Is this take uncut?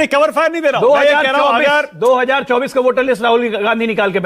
yes; 0 cuts

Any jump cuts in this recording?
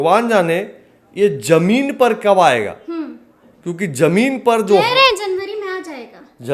no; 0 cuts

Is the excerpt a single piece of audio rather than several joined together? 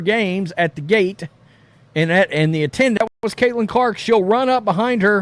no; 1 cut; at 3.2 s

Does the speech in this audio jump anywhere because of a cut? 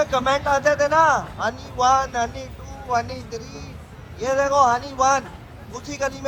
no; 0 cuts

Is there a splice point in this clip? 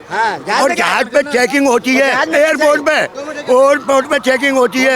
no; 0 cuts

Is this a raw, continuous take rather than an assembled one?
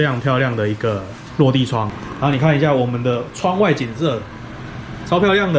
no; 1 cut; at 2.0 s

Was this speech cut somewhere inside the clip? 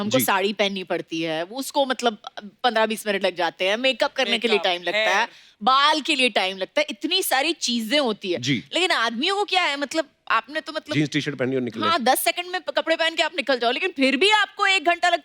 no; 0 cuts

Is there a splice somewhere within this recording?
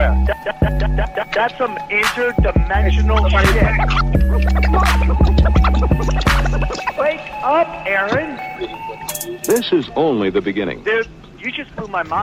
no; 0 cuts

